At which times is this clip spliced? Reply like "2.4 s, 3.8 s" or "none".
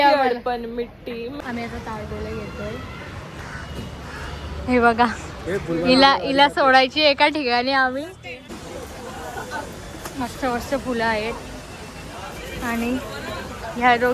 1.4 s, 8.5 s